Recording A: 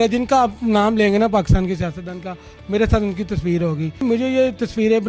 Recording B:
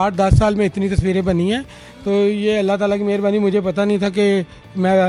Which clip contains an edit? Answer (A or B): A